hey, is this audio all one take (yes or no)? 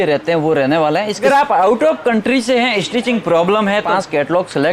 no